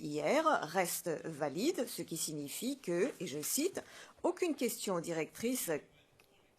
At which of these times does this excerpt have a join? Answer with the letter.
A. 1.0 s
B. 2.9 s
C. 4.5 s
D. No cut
C